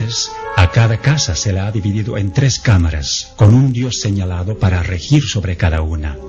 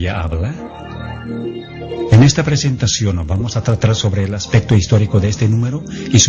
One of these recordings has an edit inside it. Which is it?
first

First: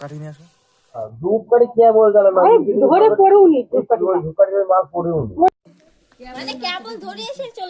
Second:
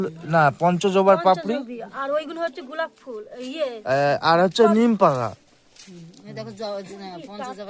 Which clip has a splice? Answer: first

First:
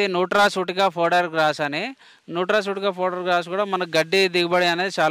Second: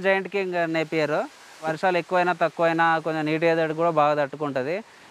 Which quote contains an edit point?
second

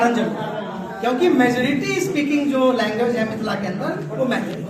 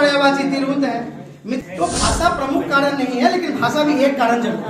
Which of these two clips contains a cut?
second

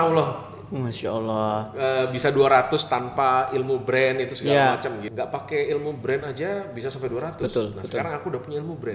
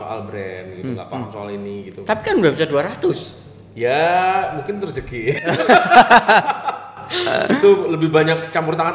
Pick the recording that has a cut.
first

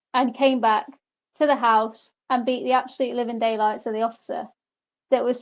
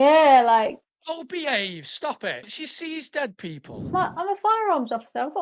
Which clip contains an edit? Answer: second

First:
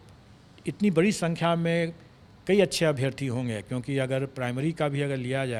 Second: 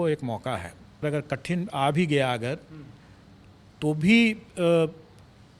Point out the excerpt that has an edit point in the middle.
second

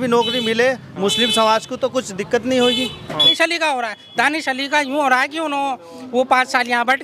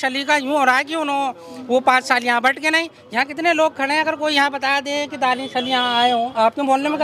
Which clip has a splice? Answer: first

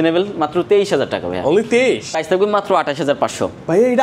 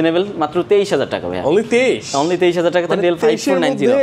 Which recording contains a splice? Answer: first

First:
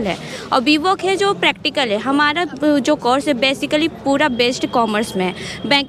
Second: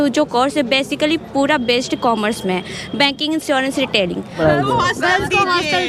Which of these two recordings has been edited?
second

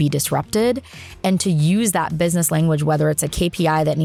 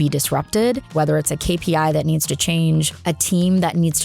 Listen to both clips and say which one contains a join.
second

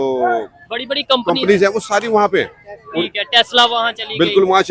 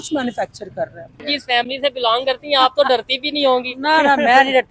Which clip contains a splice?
second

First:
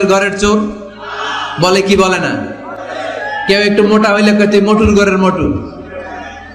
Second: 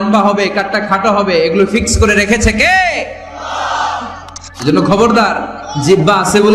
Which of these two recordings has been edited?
second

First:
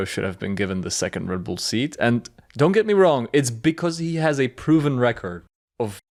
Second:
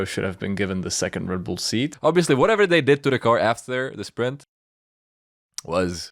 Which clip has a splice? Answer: second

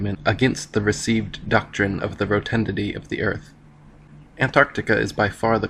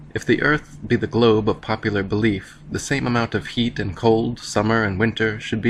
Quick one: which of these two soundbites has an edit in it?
second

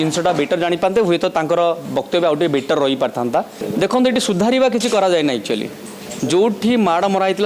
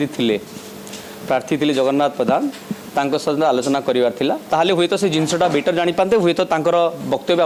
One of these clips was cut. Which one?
first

